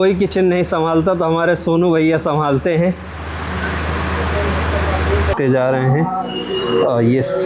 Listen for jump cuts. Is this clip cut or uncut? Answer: cut